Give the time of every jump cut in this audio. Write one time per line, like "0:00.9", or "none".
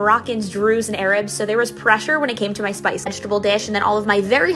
0:03.1